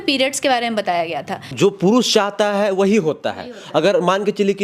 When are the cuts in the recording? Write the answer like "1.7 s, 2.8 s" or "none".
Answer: 1.5 s